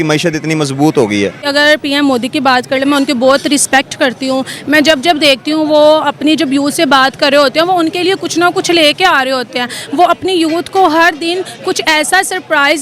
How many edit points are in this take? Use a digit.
1